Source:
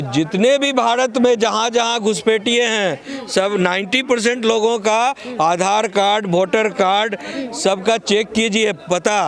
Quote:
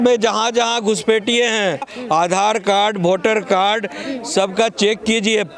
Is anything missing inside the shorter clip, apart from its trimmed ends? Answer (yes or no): yes